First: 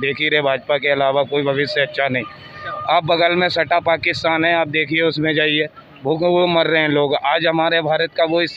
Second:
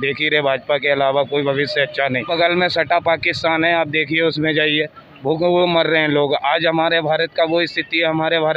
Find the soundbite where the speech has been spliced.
second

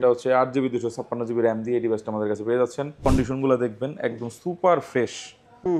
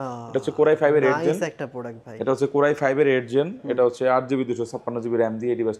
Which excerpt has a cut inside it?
first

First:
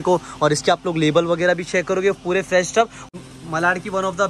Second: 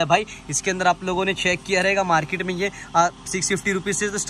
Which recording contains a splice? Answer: first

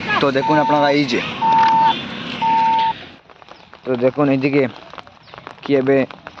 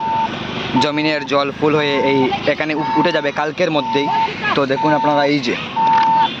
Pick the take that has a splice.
first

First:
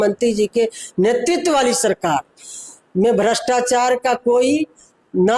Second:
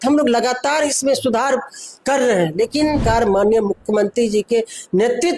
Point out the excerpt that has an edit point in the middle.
second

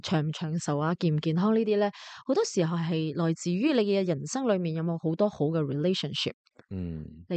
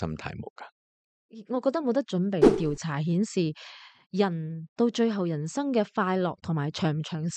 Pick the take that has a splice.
second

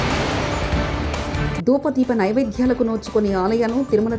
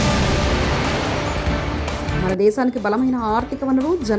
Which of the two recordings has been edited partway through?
first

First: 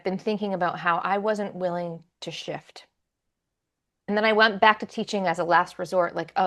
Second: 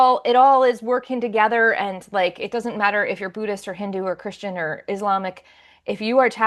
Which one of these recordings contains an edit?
first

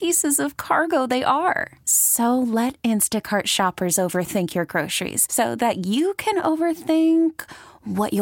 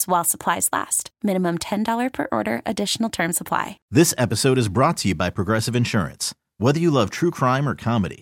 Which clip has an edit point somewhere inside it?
second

